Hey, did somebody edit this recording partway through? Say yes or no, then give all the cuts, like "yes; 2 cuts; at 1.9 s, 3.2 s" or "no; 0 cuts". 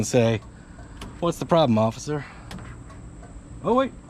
no; 0 cuts